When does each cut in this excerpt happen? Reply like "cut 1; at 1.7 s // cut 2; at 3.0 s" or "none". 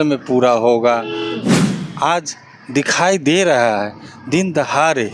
cut 1; at 1.5 s